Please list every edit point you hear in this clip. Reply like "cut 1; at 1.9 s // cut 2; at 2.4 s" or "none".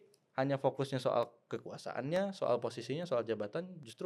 none

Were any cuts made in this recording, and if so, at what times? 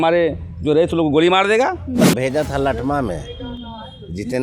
cut 1; at 2.0 s

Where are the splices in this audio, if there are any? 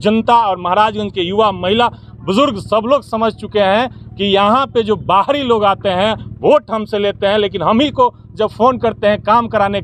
none

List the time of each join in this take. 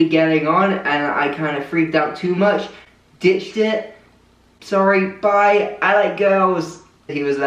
none

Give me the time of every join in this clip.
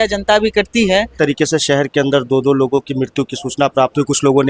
cut 1; at 1.1 s

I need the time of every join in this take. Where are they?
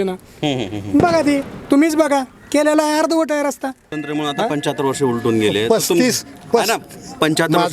cut 1; at 3.9 s

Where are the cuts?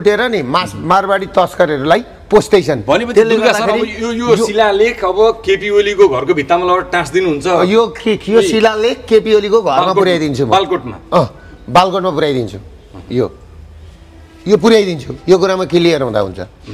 none

